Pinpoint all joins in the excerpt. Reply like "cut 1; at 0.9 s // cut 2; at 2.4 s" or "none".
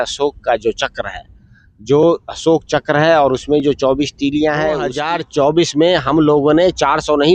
cut 1; at 4.9 s